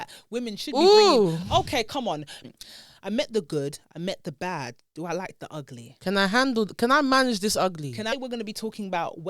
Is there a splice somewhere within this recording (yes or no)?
yes